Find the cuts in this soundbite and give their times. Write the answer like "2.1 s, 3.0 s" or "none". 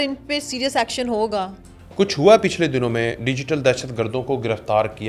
none